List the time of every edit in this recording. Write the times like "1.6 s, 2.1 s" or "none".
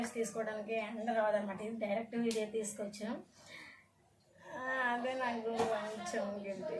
none